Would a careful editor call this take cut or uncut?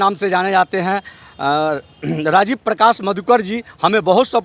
uncut